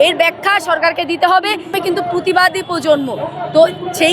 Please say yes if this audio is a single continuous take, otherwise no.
no